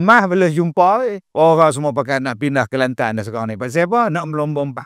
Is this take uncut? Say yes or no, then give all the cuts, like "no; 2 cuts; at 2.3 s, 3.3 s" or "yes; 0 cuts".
no; 1 cut; at 1.2 s